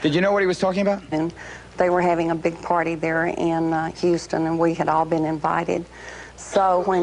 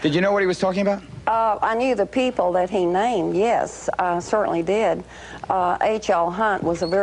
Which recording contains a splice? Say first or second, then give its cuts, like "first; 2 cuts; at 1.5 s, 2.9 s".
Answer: second; 1 cut; at 1.0 s